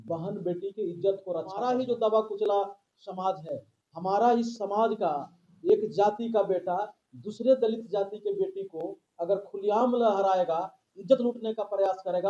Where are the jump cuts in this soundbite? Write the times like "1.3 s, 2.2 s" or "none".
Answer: 1.6 s